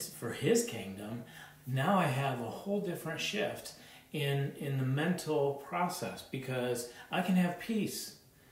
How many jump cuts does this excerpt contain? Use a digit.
0